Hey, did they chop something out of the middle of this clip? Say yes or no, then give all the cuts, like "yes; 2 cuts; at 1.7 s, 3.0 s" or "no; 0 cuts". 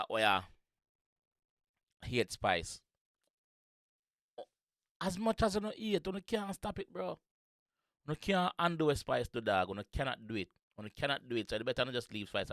no; 0 cuts